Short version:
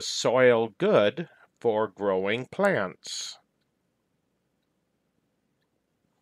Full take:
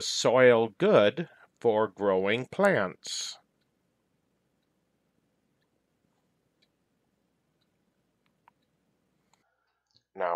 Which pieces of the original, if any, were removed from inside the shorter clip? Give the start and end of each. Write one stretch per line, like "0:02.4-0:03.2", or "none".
none